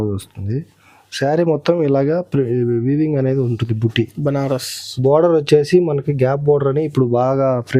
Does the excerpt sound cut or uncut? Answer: uncut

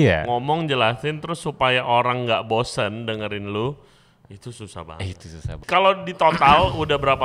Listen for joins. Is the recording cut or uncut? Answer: cut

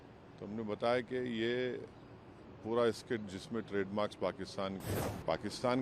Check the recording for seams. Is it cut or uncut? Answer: cut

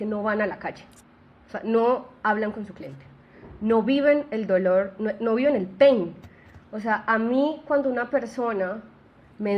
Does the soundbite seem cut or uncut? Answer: uncut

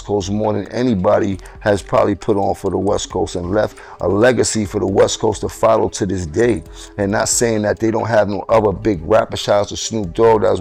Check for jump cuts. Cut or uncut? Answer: uncut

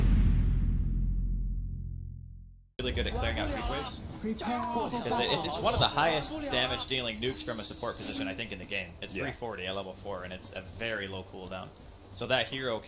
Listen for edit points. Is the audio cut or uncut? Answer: uncut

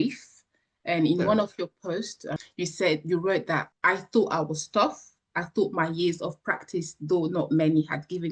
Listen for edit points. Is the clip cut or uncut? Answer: cut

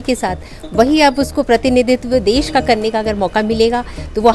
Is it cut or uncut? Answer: uncut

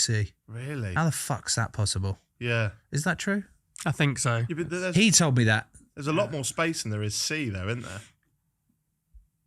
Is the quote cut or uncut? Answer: uncut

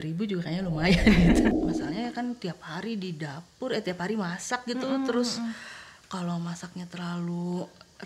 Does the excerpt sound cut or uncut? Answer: cut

